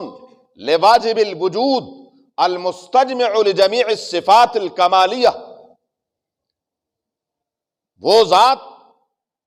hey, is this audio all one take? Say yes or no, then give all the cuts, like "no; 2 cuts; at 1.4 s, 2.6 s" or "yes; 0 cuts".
yes; 0 cuts